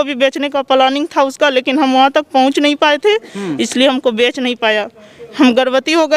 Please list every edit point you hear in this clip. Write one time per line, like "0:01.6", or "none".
none